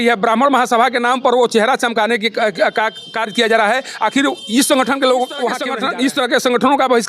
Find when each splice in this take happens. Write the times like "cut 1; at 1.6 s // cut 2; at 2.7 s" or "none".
cut 1; at 5.7 s